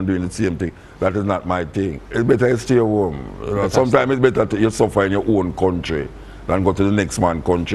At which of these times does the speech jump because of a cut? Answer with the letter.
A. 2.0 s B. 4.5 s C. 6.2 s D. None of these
A